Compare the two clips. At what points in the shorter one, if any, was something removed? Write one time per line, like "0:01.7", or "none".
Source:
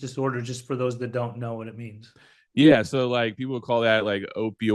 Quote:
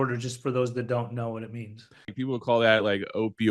0:02.2